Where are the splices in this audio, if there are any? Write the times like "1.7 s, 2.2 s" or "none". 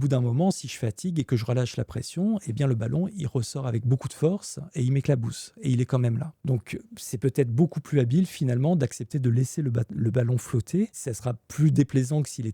6.3 s, 11.1 s